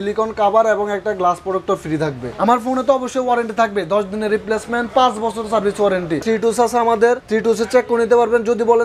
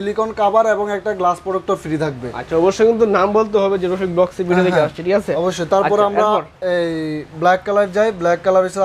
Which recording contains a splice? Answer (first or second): first